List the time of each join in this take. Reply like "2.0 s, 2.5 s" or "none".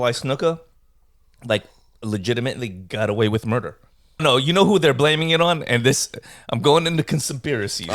4.2 s